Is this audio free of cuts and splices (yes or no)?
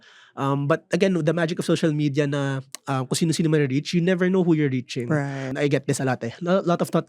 no